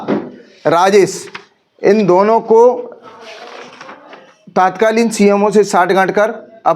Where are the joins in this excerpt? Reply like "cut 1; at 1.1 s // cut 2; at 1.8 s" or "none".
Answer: none